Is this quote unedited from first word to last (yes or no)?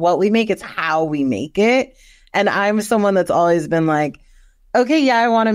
yes